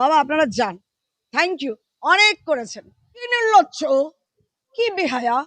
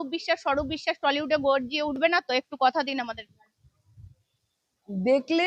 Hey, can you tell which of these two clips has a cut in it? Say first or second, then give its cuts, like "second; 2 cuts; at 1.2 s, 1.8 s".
first; 1 cut; at 3.3 s